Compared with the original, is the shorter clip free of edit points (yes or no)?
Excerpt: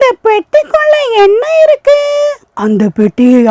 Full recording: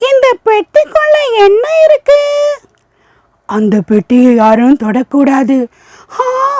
no